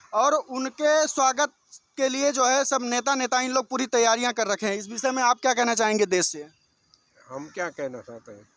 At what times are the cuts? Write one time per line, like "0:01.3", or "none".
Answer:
none